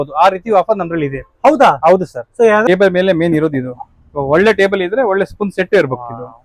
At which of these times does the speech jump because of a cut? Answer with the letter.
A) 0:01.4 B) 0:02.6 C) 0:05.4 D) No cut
B